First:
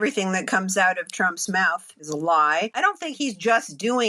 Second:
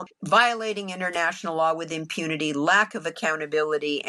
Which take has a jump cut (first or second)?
first